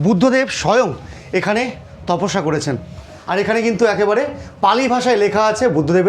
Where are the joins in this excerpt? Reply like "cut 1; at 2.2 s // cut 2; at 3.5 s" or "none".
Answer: cut 1; at 3.2 s